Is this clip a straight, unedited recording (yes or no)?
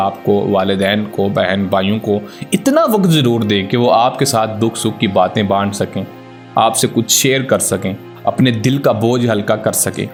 yes